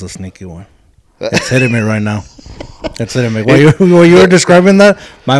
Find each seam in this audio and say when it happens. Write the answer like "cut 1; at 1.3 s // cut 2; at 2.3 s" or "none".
none